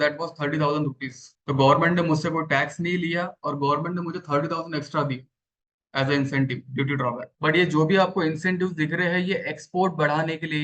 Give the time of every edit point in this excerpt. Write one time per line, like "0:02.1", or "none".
0:07.3